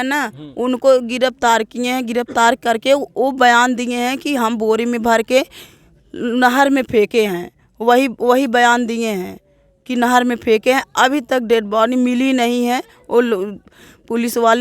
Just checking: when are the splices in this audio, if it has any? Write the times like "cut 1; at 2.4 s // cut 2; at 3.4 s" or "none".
none